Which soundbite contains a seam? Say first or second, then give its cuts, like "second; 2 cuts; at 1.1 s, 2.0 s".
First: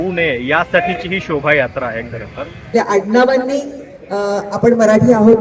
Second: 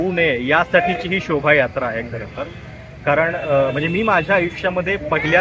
first; 1 cut; at 2.6 s